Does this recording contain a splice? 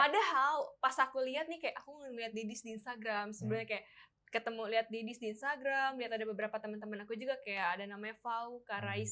no; 0 cuts

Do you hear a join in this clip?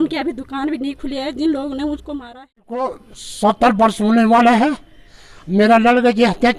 yes; 1 cut; at 2.8 s

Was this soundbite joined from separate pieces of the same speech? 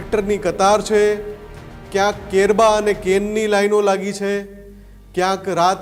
no; 0 cuts

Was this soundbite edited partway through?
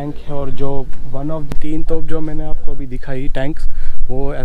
yes; 1 cut; at 1.5 s

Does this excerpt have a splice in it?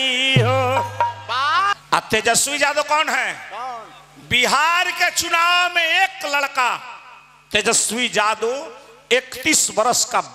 yes; 1 cut; at 1.7 s

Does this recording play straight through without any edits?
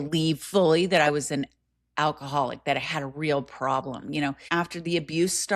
no; 1 cut; at 4.4 s

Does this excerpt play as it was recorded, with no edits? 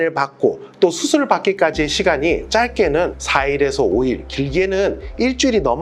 yes; 0 cuts

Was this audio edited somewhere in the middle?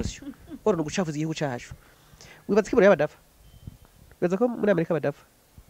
no; 0 cuts

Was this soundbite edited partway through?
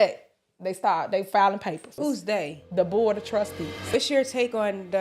yes; 2 cuts; at 1.9 s, 3.9 s

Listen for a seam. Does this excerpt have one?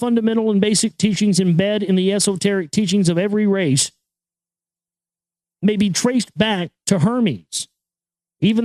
no; 0 cuts

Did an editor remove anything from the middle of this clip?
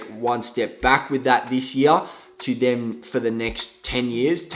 no; 0 cuts

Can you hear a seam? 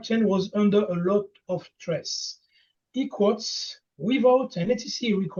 no; 0 cuts

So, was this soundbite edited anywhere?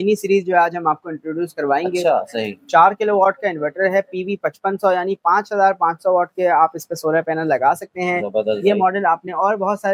no; 0 cuts

